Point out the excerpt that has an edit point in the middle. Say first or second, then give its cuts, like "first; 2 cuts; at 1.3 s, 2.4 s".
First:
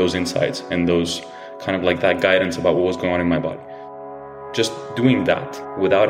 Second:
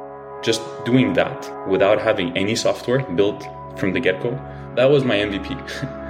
second; 1 cut; at 4.5 s